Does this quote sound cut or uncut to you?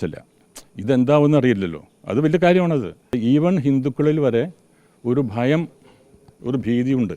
cut